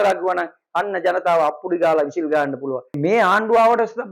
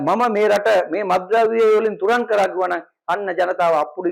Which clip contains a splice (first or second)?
first